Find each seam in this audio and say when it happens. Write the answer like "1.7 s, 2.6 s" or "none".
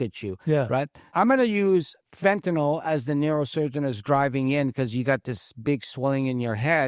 1.0 s